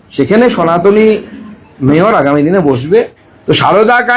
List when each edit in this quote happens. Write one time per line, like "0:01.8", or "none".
0:02.9